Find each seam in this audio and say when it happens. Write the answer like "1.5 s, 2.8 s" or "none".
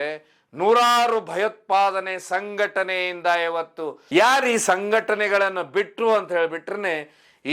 4.0 s